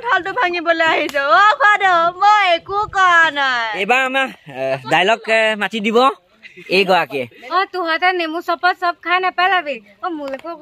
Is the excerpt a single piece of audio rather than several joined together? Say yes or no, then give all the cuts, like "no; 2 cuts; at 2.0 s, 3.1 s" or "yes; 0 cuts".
yes; 0 cuts